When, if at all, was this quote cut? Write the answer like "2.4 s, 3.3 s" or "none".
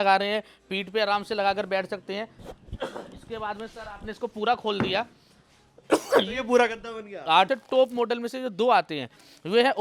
7.5 s